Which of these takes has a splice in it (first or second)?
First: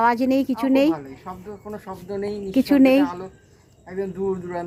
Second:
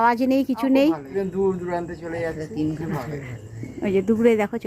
second